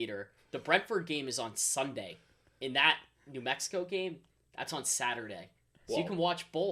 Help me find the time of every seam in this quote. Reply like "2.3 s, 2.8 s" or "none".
none